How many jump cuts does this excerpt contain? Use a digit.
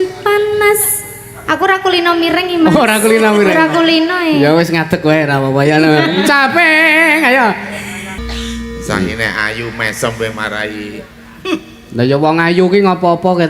1